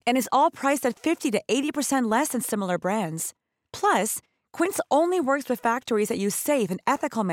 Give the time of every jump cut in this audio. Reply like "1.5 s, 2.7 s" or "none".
none